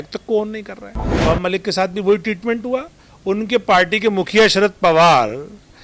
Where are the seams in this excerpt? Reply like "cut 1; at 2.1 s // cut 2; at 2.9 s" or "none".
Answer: cut 1; at 1.2 s